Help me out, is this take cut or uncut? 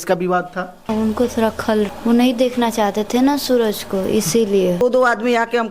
cut